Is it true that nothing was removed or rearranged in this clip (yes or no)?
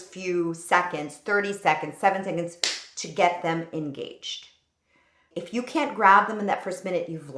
no